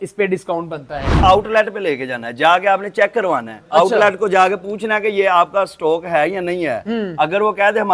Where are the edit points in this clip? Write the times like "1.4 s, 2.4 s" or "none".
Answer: 1.2 s